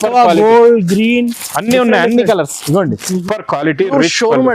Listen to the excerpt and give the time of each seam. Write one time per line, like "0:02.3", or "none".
0:03.2